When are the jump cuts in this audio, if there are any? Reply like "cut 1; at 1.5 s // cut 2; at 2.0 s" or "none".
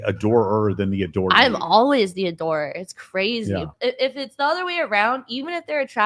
cut 1; at 3.7 s